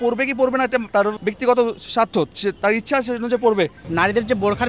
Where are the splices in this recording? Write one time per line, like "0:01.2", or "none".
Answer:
0:01.0
0:03.8

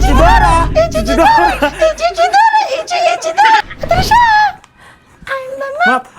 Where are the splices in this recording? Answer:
0:03.6

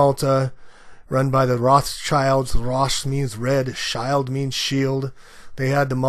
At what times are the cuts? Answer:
0:03.8

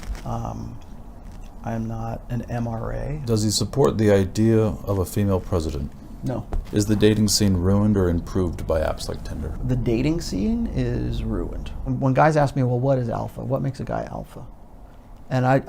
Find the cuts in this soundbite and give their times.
0:03.2
0:06.6
0:09.6
0:11.9

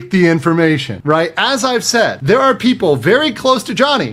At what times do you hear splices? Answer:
0:00.9
0:02.2

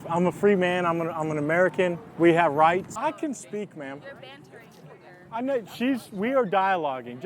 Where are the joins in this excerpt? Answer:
0:02.9

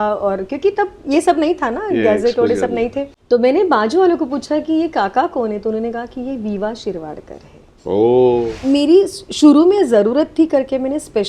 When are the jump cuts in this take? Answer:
0:03.1
0:08.5

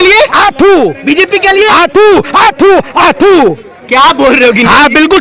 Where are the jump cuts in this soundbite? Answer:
none

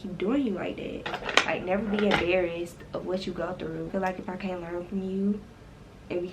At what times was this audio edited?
0:01.2
0:03.9

